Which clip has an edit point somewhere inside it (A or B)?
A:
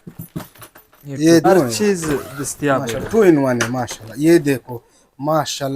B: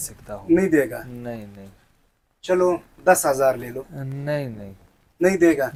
A